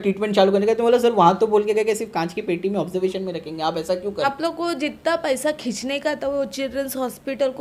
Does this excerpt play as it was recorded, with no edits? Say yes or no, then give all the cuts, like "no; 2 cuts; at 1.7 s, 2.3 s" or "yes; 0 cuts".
no; 1 cut; at 4.2 s